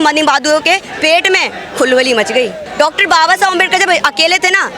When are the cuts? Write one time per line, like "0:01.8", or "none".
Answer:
0:02.6